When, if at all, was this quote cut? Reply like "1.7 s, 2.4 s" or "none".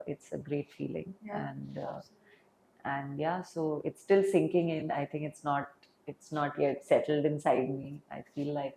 none